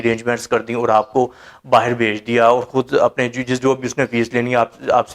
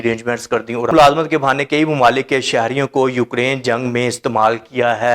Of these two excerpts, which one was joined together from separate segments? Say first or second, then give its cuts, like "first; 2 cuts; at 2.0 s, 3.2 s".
second; 1 cut; at 0.9 s